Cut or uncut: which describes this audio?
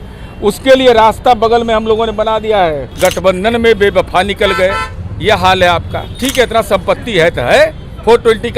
cut